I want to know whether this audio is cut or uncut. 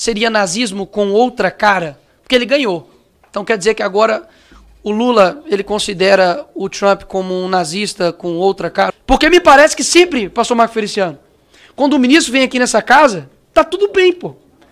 cut